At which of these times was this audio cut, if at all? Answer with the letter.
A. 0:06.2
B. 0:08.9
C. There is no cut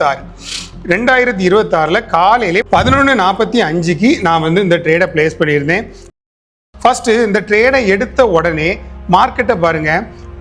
A